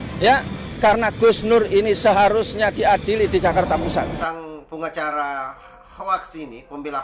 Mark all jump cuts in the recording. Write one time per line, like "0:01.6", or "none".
0:04.2